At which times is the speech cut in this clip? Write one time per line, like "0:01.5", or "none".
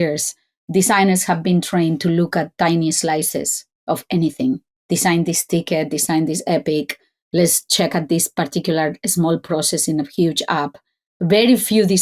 0:04.7